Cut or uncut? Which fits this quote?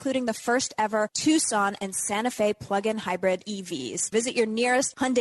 cut